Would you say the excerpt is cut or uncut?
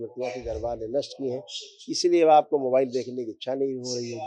uncut